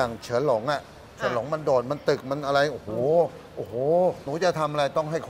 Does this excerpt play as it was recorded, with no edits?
no; 2 cuts; at 0.9 s, 4.2 s

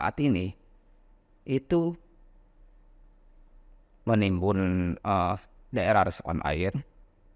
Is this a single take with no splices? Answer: yes; 0 cuts

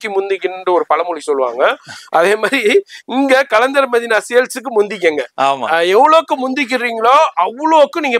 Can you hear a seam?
no; 0 cuts

